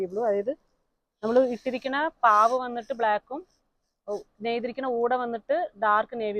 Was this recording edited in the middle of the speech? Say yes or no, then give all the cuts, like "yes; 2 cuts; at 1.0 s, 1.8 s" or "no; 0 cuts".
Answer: no; 0 cuts